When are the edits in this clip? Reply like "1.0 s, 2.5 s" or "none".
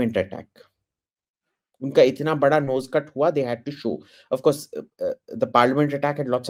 none